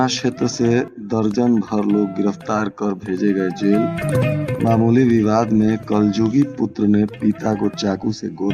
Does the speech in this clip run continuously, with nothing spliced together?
yes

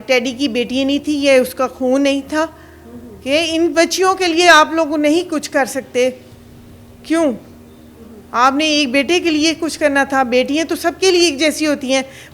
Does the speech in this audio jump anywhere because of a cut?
no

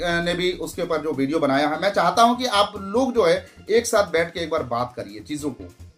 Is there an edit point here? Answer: no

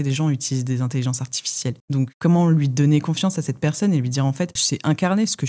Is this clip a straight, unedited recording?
yes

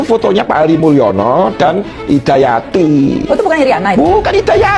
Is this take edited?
no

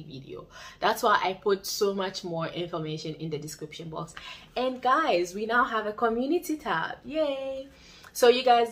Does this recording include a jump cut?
no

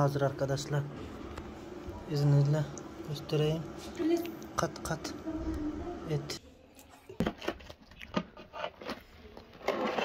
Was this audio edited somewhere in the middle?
yes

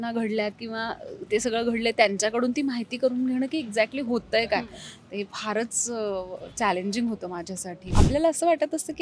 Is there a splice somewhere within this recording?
yes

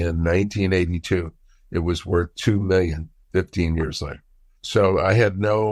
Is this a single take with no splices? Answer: yes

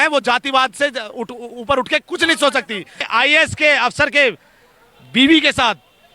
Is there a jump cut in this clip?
yes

